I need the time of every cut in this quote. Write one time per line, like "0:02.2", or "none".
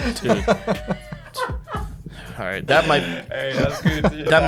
none